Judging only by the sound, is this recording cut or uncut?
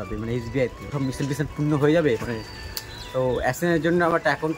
cut